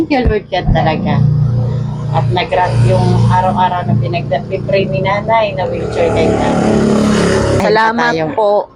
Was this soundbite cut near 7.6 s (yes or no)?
yes